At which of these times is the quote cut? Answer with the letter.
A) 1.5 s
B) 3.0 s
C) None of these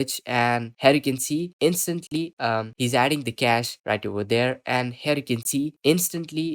C